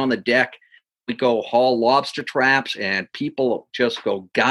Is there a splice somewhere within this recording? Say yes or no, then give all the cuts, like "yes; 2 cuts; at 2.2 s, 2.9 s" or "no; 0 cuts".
no; 0 cuts